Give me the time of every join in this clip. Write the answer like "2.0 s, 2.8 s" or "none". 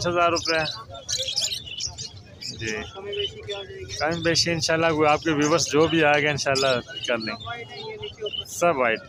none